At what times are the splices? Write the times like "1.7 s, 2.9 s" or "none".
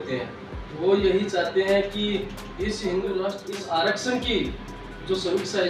3.5 s